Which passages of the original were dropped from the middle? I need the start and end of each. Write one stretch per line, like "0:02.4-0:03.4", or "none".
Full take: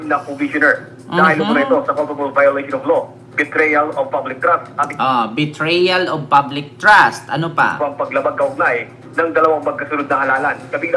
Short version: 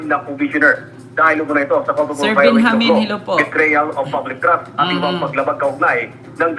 0:05.0-0:07.7

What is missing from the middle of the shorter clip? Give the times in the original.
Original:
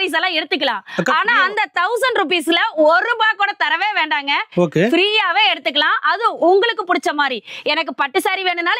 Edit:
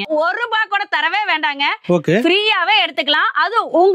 none

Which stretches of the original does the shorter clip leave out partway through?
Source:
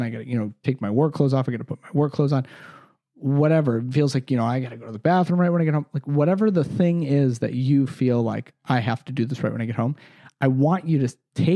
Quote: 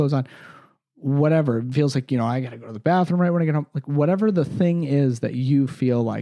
none

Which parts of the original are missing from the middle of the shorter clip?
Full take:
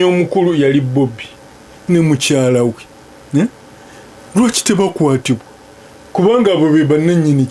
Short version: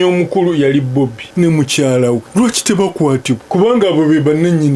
0:01.2-0:01.7
0:02.8-0:04.3
0:05.4-0:06.1

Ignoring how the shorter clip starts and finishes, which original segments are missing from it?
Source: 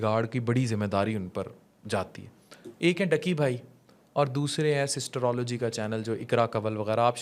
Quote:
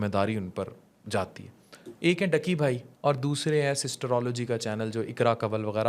0:03.7-0:04.0

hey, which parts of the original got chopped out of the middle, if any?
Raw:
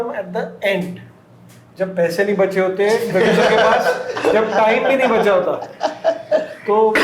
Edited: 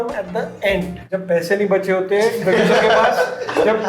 0:01.0-0:01.7

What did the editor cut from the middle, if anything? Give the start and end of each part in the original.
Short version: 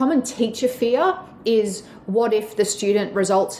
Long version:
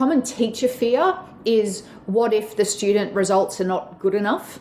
none

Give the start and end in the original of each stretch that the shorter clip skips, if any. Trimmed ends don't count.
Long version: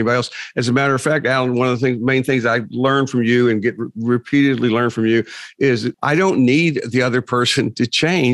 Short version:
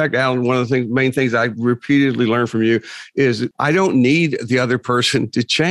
0:02.6-0:04.0

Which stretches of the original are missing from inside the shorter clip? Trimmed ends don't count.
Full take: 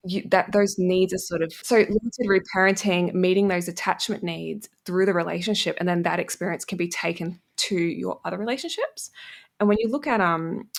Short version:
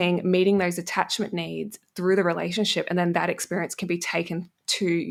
none

